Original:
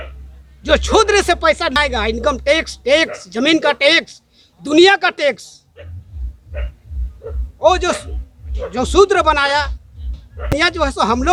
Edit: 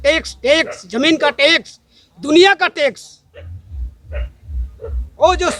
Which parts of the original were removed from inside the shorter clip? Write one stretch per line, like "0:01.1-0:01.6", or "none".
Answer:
none

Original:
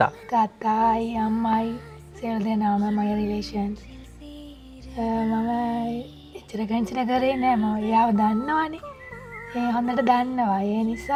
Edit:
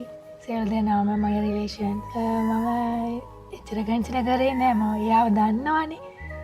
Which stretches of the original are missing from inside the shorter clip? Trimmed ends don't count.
0:03.8-0:04.9

